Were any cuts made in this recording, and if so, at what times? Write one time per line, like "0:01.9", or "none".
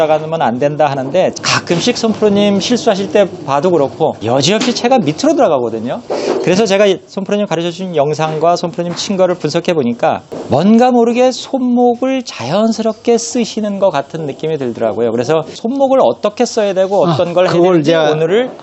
0:01.4
0:04.2
0:06.1
0:15.6